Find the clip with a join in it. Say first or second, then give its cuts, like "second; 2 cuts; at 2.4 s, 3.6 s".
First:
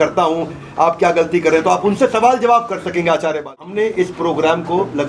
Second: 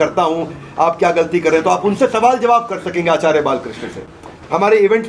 first; 1 cut; at 3.7 s